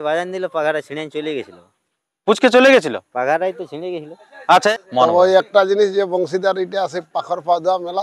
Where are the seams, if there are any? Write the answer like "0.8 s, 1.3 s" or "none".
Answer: 4.7 s